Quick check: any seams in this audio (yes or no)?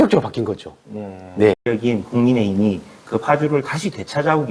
yes